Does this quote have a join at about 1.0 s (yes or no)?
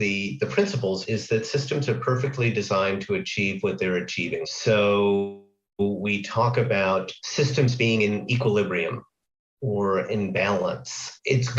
yes